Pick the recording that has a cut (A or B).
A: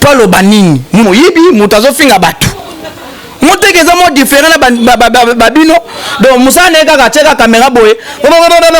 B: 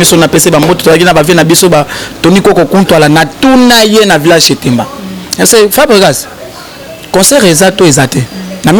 A